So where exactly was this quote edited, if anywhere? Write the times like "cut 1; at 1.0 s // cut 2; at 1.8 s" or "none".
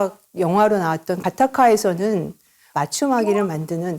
cut 1; at 1.2 s // cut 2; at 2.7 s